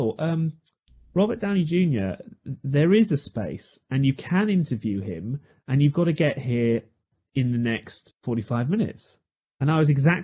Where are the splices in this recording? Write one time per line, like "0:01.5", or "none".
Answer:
none